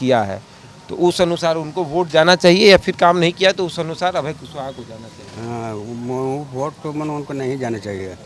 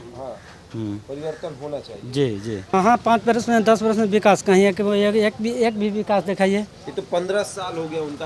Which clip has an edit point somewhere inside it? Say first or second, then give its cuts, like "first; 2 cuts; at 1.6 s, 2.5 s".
second; 1 cut; at 2.6 s